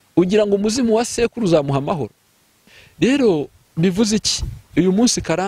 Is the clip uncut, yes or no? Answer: no